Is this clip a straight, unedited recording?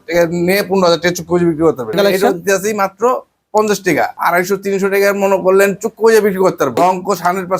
no; 3 cuts; at 2.0 s, 4.2 s, 6.8 s

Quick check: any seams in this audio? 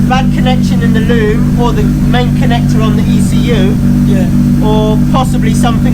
no; 0 cuts

